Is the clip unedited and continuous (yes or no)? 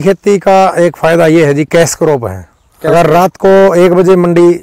yes